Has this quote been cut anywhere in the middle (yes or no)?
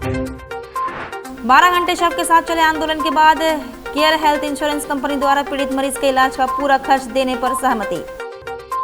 yes